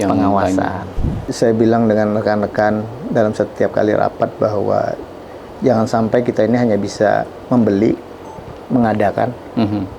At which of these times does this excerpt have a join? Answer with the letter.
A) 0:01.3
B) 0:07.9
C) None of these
A